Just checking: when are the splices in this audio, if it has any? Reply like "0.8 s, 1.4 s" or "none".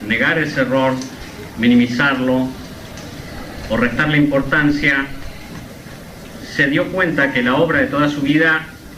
1.9 s